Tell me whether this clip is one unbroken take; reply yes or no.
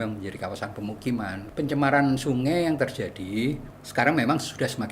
no